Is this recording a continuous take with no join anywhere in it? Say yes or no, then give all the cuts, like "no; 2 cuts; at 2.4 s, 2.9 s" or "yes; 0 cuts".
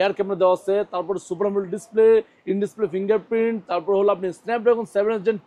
yes; 0 cuts